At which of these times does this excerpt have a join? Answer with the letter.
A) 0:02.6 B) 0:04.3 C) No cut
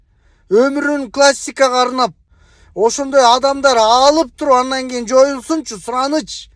A